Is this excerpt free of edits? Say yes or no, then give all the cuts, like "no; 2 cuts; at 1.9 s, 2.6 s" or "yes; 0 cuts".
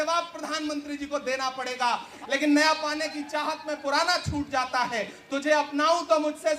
no; 1 cut; at 2.1 s